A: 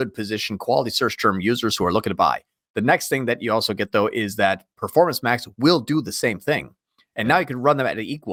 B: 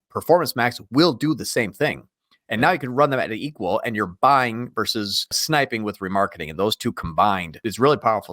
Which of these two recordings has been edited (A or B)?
B